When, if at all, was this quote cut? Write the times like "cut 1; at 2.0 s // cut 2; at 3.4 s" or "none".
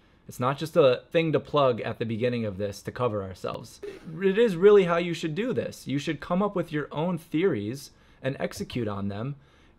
cut 1; at 1.0 s // cut 2; at 3.7 s